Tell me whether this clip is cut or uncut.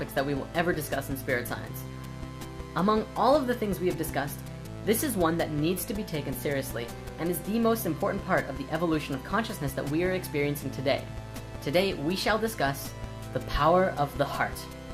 uncut